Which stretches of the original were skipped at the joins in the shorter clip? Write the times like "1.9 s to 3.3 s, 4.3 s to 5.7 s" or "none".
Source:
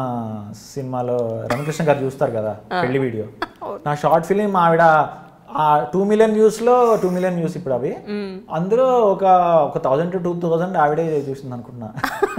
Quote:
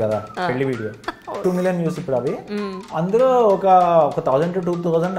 3.8 s to 7.0 s